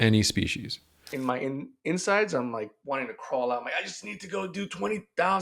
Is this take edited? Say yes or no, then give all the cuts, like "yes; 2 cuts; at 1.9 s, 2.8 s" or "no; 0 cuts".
yes; 2 cuts; at 1.1 s, 2.8 s